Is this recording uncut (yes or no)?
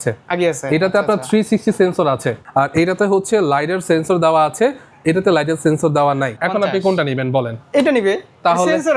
no